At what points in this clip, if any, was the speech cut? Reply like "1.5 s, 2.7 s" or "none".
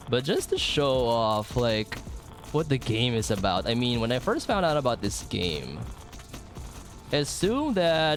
none